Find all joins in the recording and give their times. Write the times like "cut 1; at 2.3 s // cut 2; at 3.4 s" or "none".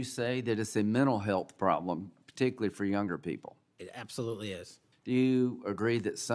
none